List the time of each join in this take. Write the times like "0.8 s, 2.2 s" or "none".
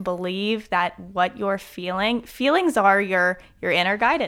none